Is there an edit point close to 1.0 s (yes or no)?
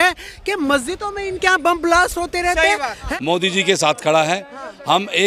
no